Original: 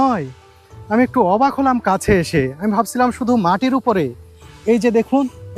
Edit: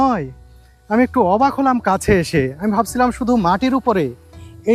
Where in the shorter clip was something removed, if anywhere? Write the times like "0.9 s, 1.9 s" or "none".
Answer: none